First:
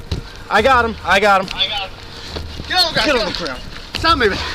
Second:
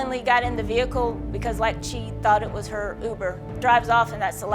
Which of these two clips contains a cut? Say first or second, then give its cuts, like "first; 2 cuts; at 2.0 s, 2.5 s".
second; 1 cut; at 3.5 s